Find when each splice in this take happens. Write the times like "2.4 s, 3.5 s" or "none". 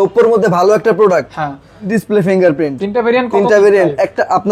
1.9 s

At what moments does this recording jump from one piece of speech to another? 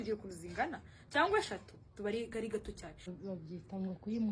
3.1 s

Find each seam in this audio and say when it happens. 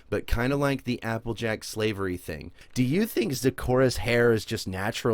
2.6 s

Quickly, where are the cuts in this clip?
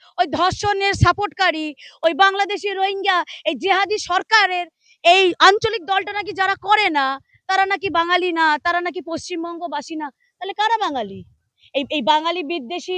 none

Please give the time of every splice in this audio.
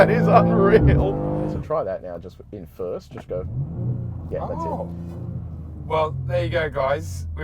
1.5 s

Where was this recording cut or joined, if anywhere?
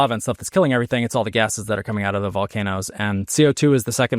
none

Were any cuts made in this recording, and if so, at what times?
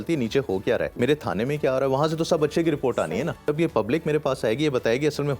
0.9 s, 3.5 s

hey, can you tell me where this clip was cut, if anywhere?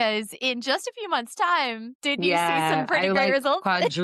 1.9 s

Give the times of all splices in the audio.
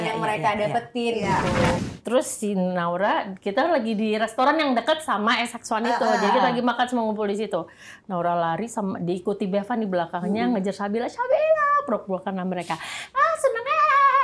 1.8 s

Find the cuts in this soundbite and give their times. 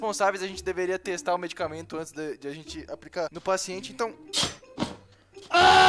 none

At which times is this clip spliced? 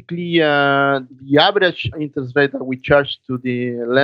1.1 s, 2.0 s

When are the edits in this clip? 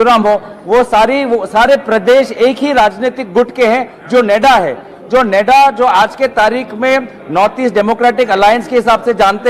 2.7 s

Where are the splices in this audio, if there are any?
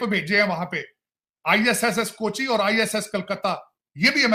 none

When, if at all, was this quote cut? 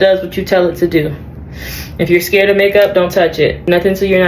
none

